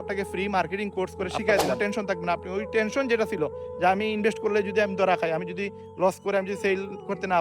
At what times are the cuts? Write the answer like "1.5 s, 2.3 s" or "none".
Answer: 1.8 s

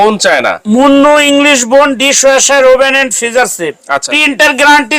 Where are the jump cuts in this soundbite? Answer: 4.0 s

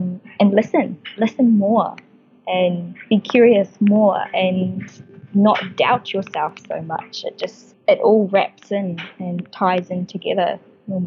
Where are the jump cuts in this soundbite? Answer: 7.7 s

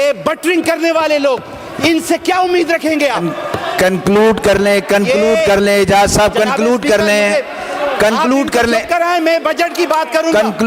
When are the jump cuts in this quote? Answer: none

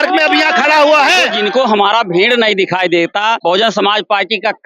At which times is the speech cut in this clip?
1.3 s, 3.4 s

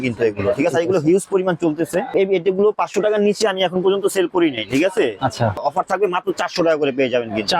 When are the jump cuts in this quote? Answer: 2.1 s, 5.6 s

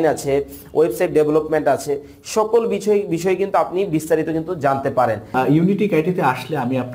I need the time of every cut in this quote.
5.3 s

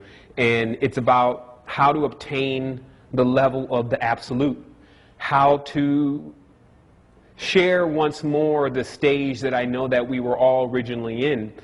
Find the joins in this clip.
9.7 s

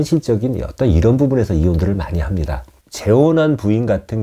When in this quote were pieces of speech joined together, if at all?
2.7 s

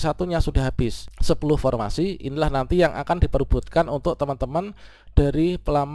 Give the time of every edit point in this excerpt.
1.1 s

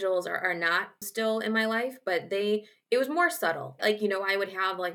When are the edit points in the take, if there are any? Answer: 1.0 s, 3.8 s

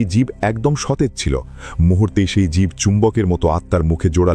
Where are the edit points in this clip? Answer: none

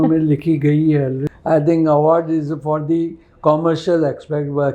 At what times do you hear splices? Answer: 1.2 s

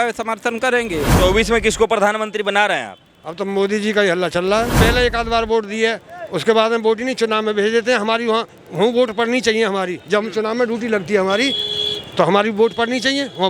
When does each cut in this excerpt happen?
1.1 s, 4.8 s

